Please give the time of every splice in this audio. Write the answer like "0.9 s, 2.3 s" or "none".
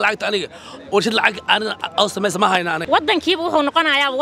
2.8 s